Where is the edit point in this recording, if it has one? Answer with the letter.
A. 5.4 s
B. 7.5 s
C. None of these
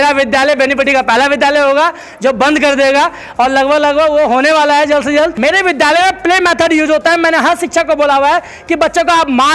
A